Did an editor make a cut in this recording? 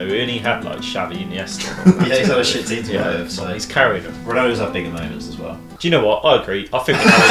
no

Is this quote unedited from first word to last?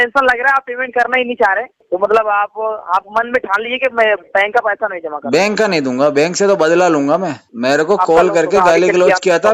no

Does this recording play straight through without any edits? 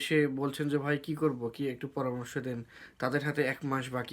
yes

